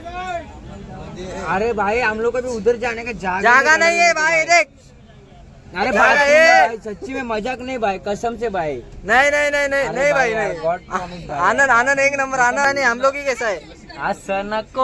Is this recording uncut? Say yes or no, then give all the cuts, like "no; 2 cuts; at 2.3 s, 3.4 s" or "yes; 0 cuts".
no; 1 cut; at 12.6 s